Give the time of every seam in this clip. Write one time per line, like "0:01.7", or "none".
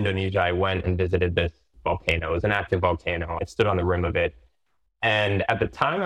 none